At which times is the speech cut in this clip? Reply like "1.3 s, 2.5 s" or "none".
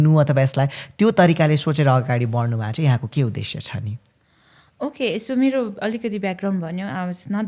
none

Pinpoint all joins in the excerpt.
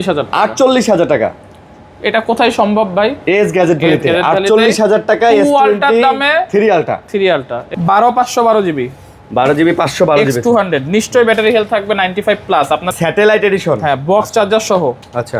7.6 s, 12.9 s

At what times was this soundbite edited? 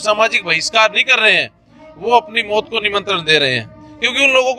none

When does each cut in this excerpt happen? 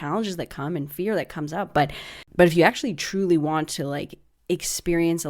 2.2 s

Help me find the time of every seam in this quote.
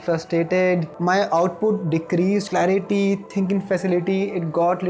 0.9 s, 2.4 s

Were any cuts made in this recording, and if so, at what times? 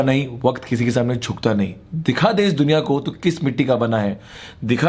none

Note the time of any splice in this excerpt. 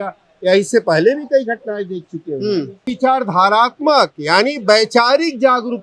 2.9 s

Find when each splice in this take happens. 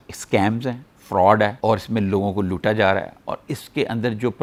none

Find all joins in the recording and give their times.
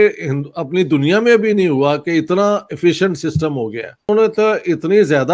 4.1 s

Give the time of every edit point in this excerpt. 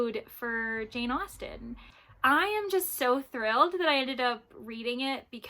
1.9 s

